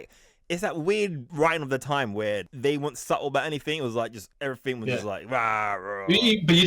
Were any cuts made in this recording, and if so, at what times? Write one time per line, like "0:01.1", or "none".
0:01.2
0:02.5
0:04.2